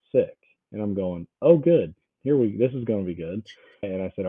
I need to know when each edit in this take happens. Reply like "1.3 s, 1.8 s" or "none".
none